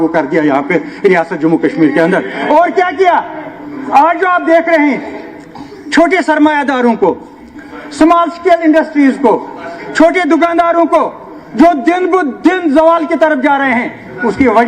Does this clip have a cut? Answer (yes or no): no